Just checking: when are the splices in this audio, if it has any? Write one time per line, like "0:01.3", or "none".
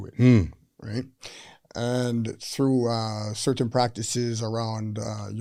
none